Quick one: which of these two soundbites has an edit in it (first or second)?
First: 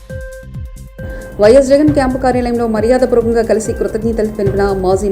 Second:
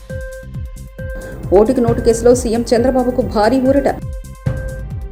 first